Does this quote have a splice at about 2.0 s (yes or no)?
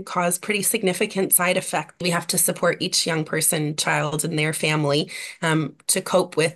yes